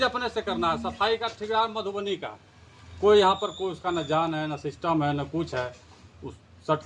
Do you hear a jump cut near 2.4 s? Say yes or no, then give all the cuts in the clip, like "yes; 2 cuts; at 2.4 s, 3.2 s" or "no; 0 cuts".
no; 0 cuts